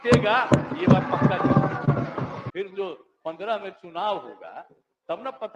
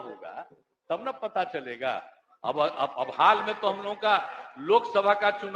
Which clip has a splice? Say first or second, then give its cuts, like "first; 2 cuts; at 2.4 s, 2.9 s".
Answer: first; 1 cut; at 2.4 s